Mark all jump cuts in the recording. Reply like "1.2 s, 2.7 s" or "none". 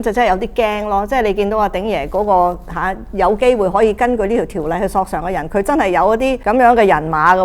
6.4 s

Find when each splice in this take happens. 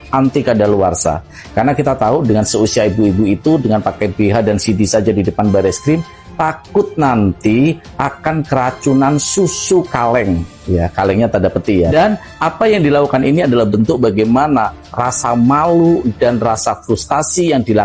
11.9 s

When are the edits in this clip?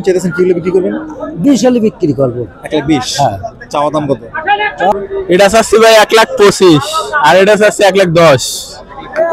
4.9 s

